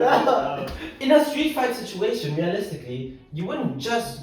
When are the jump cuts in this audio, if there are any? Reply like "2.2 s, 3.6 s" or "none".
1.0 s

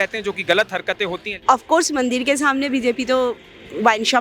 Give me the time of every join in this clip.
1.4 s

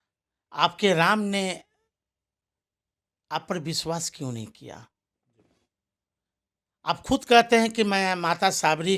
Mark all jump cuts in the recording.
none

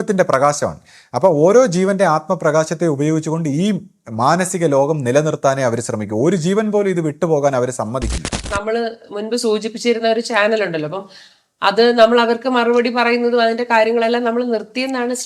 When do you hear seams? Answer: 8.6 s

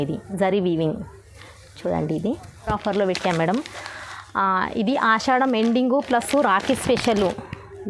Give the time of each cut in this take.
2.7 s

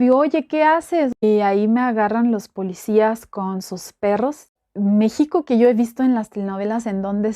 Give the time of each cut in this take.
1.2 s, 4.6 s

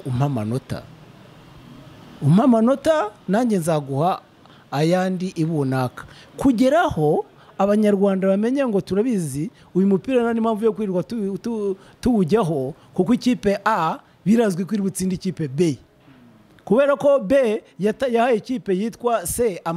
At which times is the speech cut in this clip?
none

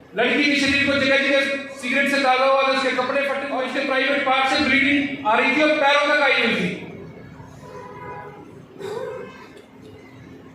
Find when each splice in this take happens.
3.5 s

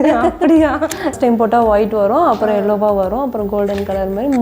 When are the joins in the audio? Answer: 1.1 s

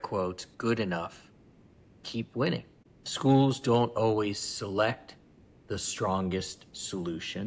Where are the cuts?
2.8 s

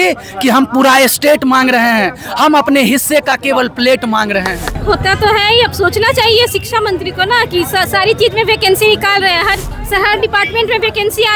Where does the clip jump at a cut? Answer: 4.7 s, 9.7 s

